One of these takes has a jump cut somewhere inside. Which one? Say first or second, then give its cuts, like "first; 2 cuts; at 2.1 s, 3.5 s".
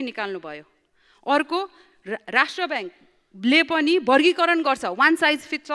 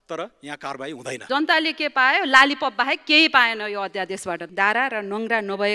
second; 2 cuts; at 1.3 s, 4.5 s